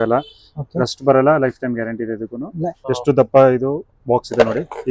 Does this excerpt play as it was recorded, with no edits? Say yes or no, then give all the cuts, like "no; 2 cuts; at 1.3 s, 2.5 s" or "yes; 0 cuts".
no; 1 cut; at 2.8 s